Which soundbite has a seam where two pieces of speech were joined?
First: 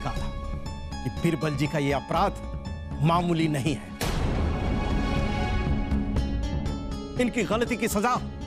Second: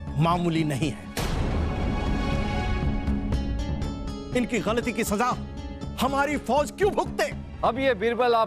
second; 1 cut; at 7.4 s

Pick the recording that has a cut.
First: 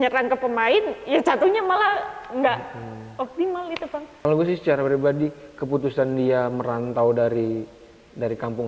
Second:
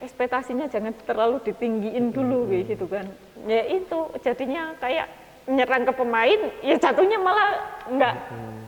first; 1 cut; at 4.2 s

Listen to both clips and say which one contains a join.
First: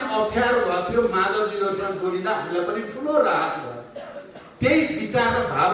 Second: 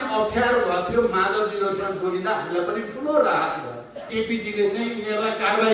second; 1 cut; at 4.1 s

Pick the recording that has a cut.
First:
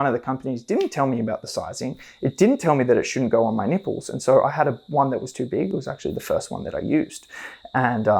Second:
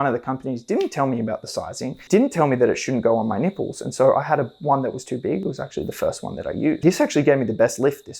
second; 2 cuts; at 2.1 s, 6.8 s

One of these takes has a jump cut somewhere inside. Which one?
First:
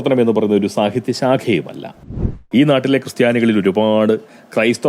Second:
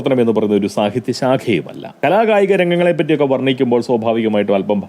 first; 1 cut; at 2.0 s

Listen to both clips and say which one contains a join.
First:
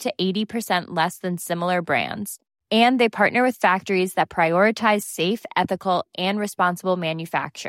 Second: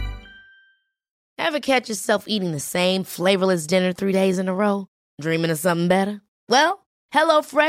second; 1 cut; at 1.2 s

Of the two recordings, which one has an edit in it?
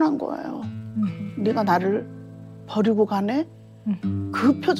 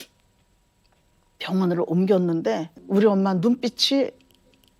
second; 1 cut; at 2.7 s

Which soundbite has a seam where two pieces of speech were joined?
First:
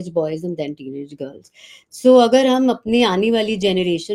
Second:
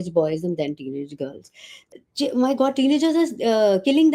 second; 1 cut; at 1.8 s

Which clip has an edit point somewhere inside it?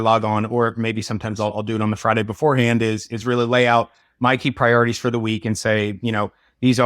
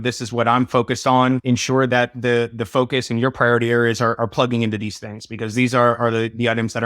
second; 1 cut; at 1.7 s

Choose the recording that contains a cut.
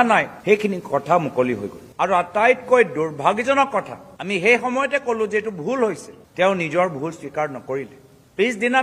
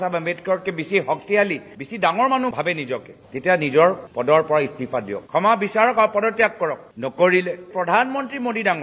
second; 2 cuts; at 5.2 s, 7.7 s

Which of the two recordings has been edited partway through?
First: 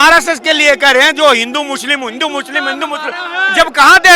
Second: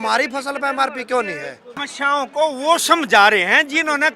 second; 1 cut; at 1.9 s

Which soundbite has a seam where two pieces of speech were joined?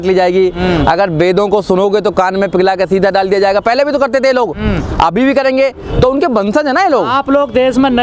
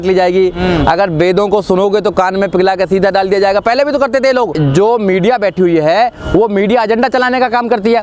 second; 1 cut; at 4.6 s

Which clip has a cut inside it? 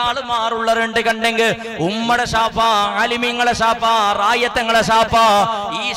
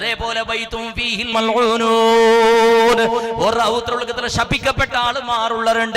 second; 1 cut; at 1.3 s

